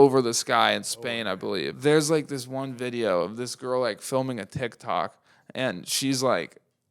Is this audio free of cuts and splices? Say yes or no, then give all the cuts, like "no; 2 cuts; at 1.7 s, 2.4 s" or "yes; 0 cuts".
no; 1 cut; at 1.7 s